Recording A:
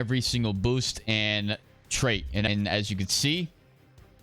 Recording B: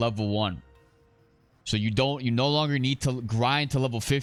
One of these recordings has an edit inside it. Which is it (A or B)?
A